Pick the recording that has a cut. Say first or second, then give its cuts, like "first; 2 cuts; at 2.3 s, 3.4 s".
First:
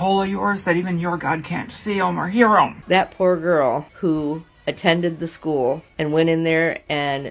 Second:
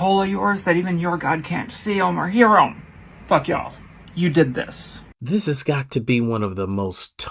first; 3 cuts; at 2.8 s, 3.9 s, 5.9 s